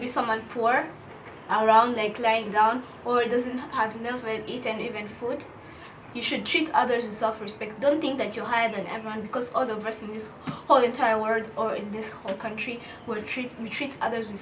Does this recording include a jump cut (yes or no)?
no